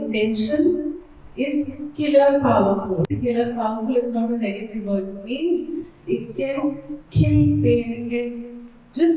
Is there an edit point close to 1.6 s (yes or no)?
no